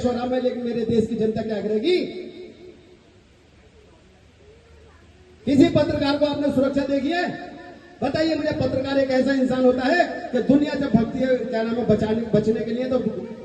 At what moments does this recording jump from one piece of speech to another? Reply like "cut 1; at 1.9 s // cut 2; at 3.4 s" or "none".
none